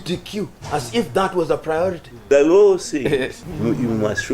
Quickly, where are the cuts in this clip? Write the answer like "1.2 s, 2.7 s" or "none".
2.1 s, 3.4 s